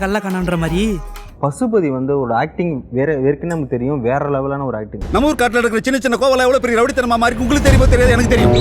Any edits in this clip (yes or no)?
yes